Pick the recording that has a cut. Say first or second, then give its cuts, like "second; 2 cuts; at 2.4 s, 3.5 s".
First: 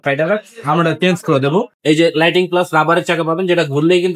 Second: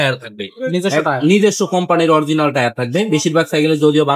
first; 1 cut; at 1.7 s